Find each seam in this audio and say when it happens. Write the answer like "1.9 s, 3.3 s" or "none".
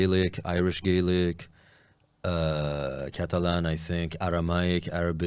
none